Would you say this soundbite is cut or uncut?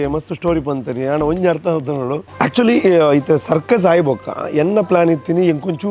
cut